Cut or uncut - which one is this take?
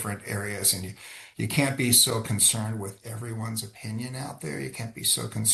uncut